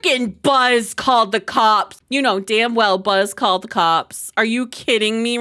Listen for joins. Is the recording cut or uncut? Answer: cut